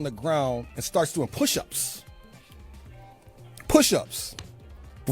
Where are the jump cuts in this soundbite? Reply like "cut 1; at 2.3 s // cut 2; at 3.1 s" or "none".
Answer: none